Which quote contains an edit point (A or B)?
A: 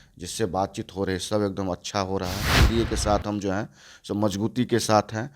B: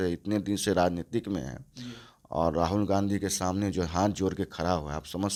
A